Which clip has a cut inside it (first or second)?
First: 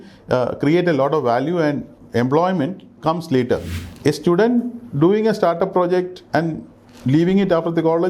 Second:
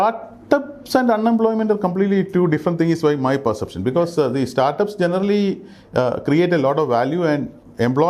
first